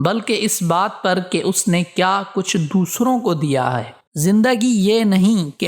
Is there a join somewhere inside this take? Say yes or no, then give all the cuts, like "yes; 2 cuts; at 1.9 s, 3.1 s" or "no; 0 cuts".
no; 0 cuts